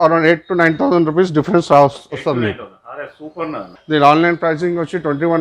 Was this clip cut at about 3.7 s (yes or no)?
yes